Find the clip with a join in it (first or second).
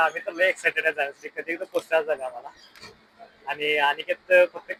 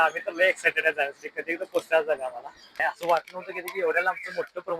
second